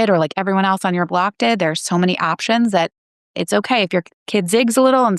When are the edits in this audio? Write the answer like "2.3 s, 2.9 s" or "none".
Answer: none